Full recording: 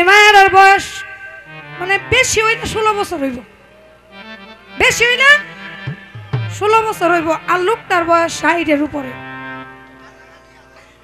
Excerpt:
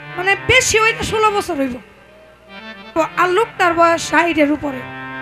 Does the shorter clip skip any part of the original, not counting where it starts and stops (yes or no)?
yes